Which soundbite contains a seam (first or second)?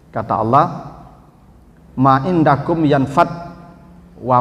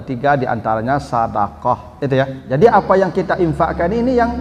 second